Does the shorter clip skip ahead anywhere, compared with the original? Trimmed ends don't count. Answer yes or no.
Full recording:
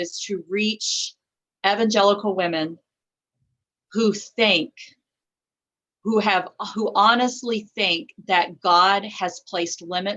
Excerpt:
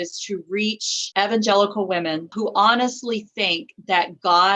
yes